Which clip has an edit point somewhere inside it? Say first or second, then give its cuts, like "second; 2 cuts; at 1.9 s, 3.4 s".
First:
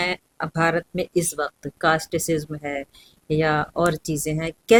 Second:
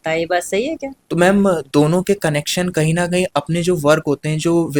second; 1 cut; at 0.9 s